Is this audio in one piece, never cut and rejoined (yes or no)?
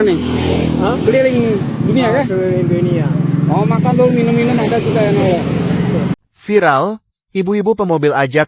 no